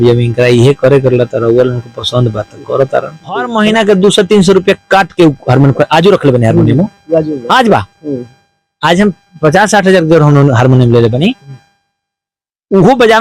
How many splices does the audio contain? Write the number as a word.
one